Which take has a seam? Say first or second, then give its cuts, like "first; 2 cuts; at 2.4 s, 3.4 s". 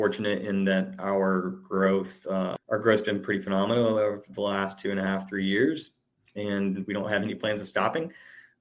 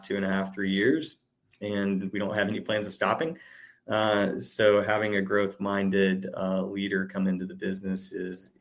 first; 1 cut; at 2.6 s